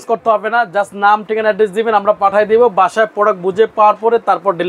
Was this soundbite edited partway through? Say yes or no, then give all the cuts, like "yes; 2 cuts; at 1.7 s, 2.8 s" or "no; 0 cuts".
no; 0 cuts